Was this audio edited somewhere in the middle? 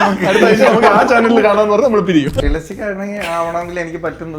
yes; 1 cut; at 2.3 s

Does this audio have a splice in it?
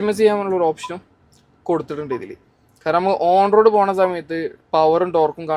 no; 0 cuts

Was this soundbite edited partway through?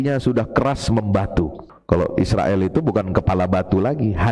yes; 1 cut; at 1.7 s

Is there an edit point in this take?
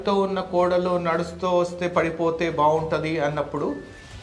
no; 0 cuts

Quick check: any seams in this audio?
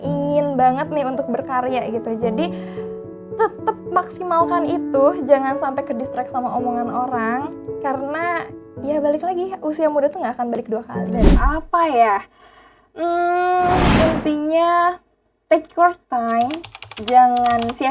yes; 1 cut; at 11.3 s

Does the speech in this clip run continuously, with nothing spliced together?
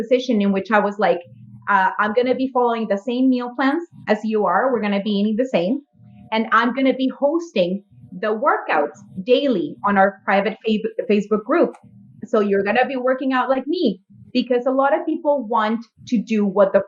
yes; 0 cuts

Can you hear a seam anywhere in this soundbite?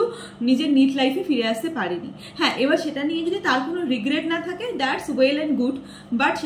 no; 0 cuts

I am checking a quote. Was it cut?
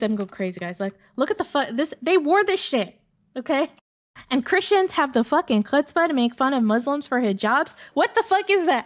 no; 0 cuts

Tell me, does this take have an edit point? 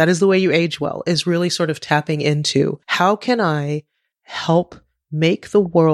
yes; 1 cut; at 2.8 s

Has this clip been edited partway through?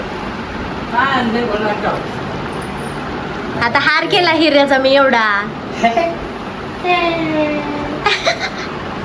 no; 0 cuts

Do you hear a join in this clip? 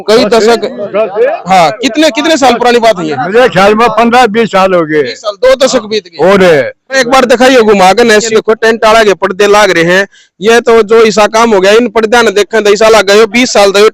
yes; 2 cuts; at 7.0 s, 8.3 s

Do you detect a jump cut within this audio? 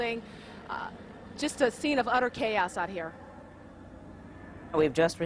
no; 0 cuts

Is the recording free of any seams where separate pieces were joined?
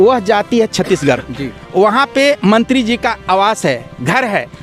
yes; 0 cuts

